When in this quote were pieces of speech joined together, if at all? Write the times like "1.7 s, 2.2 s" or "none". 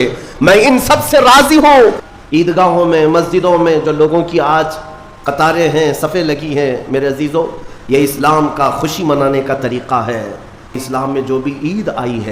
2.0 s, 10.8 s

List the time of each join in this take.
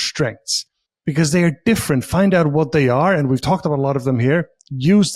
none

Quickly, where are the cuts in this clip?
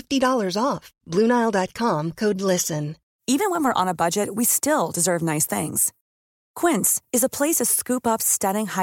3.0 s

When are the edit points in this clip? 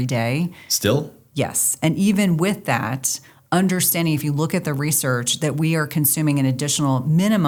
none

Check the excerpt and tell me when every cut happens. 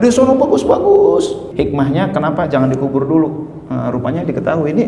1.4 s

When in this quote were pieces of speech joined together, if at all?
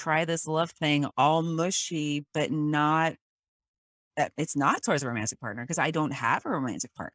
1.1 s

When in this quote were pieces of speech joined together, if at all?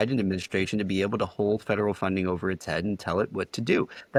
none

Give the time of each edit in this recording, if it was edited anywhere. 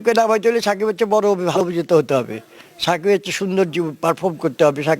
1.6 s

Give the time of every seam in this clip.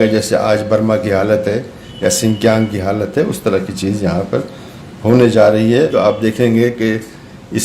5.9 s

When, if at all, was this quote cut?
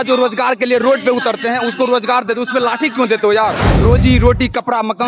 3.7 s

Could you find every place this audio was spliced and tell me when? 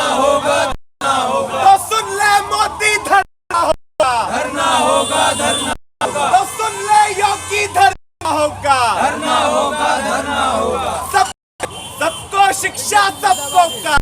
none

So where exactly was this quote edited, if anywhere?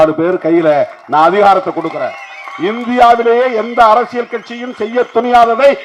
none

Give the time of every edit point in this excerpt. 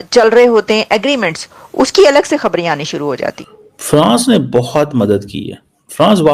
3.6 s

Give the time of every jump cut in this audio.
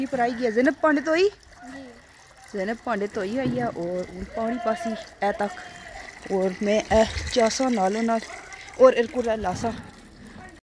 none

